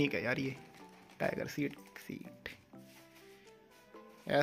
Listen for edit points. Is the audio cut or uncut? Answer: uncut